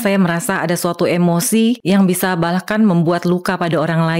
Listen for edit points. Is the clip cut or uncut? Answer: cut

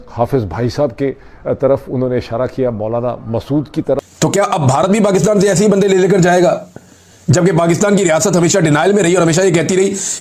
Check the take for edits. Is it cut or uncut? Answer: cut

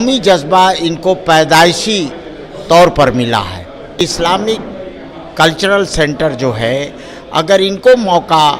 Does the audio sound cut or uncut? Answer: cut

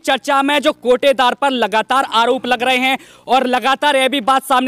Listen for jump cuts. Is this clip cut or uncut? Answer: uncut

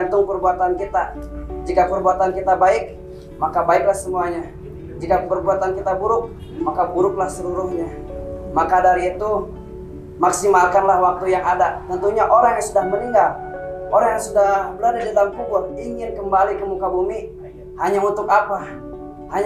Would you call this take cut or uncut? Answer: uncut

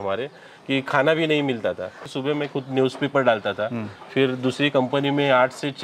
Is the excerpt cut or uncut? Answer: cut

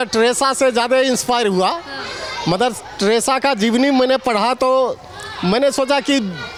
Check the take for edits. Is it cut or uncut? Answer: uncut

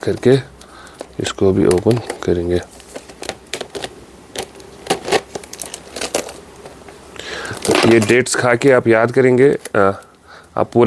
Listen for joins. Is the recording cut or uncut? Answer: uncut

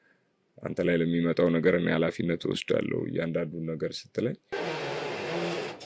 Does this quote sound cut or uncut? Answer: cut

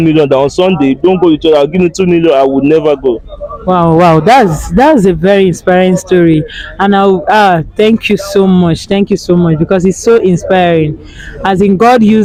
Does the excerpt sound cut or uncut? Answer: uncut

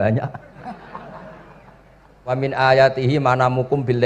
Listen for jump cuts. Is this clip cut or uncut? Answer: cut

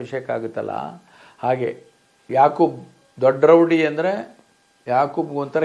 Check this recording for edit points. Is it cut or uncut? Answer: uncut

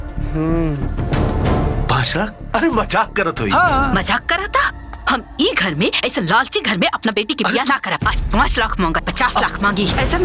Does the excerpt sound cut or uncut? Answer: cut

